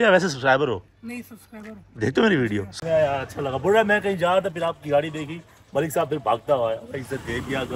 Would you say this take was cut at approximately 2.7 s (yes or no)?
yes